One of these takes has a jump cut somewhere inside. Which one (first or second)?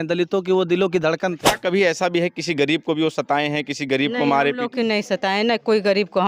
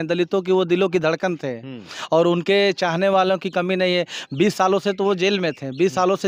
first